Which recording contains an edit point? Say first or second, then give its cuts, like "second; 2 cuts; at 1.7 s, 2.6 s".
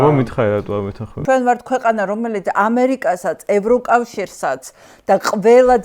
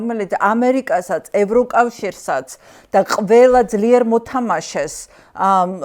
first; 1 cut; at 1.1 s